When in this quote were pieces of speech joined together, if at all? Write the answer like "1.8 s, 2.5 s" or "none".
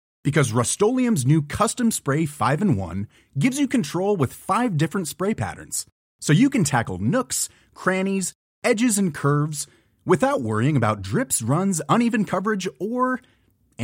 none